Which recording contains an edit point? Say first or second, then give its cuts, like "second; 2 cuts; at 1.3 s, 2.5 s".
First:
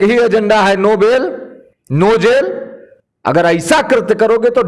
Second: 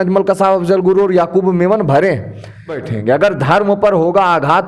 second; 1 cut; at 2.8 s